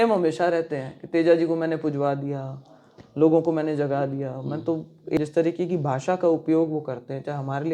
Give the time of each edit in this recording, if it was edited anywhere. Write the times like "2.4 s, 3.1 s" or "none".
5.2 s